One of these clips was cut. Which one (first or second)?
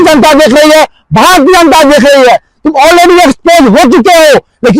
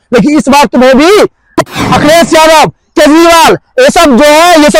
second